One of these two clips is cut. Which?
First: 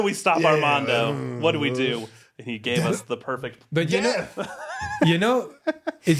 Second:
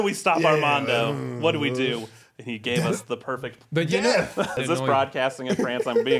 second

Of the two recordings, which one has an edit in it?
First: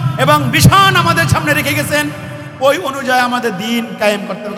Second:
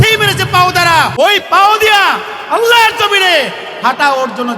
second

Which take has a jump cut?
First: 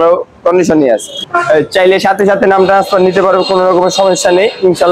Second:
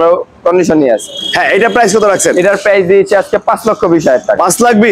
first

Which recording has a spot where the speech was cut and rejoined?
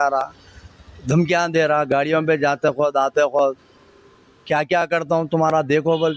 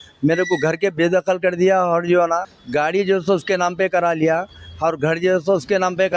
second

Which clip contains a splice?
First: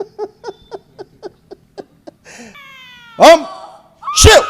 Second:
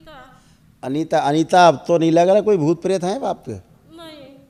first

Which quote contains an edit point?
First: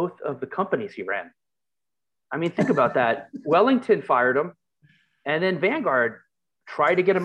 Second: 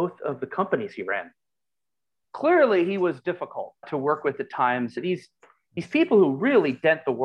second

